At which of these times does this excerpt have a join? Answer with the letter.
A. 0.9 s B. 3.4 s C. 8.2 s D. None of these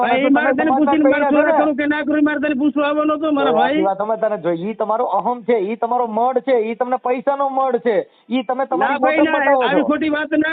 D